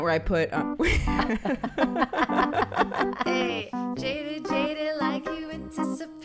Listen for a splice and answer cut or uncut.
cut